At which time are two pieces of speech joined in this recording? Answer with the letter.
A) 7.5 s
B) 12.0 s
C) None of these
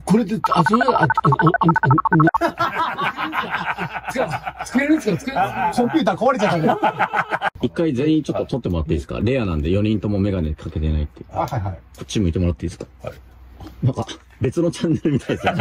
A